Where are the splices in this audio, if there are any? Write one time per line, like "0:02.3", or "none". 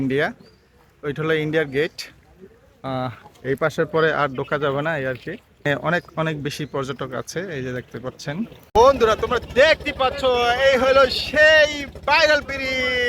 0:08.6